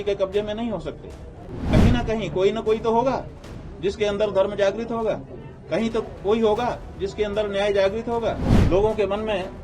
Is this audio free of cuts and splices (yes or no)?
no